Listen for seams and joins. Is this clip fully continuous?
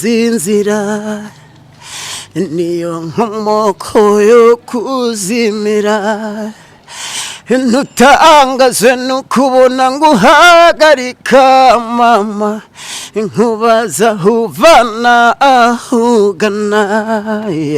yes; 0 cuts

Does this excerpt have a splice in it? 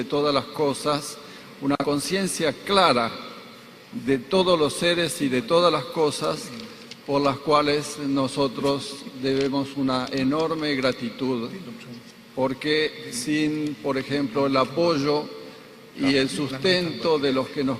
yes; 1 cut; at 5.0 s

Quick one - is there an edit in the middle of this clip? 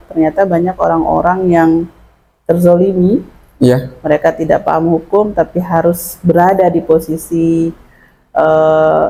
no; 0 cuts

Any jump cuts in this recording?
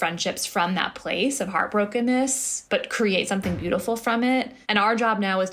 no; 0 cuts

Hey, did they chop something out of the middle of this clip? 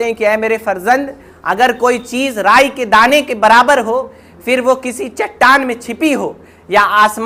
no; 0 cuts

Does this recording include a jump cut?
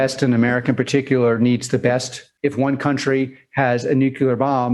yes; 1 cut; at 2.3 s

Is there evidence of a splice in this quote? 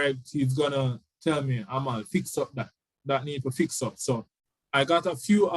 yes; 1 cut; at 4.4 s

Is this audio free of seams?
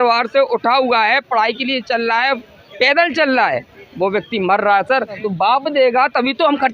no; 2 cuts; at 2.4 s, 5.2 s

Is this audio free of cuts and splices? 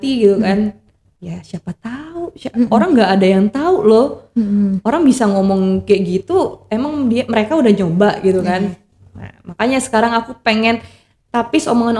yes; 0 cuts

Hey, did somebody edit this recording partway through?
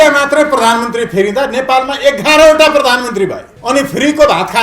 yes; 1 cut; at 3.5 s

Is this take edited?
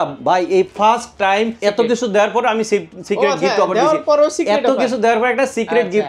yes; 1 cut; at 1.5 s

